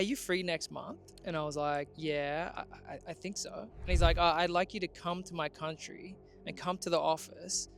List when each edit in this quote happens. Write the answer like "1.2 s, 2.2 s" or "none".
1.0 s, 1.9 s